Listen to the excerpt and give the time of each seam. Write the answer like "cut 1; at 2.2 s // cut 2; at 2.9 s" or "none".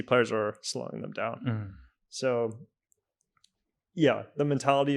none